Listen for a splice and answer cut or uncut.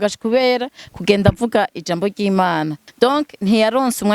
cut